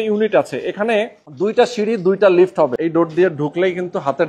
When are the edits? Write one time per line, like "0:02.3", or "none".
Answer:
0:02.7